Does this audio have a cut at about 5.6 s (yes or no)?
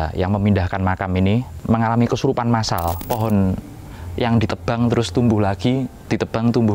no